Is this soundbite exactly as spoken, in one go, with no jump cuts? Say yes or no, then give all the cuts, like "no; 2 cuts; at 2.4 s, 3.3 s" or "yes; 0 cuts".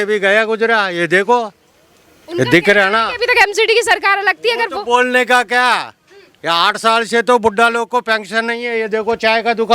yes; 0 cuts